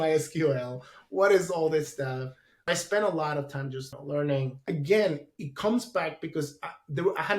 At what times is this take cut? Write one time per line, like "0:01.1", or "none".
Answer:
none